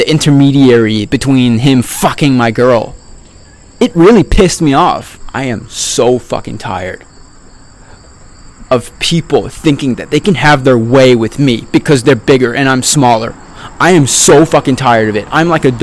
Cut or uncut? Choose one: cut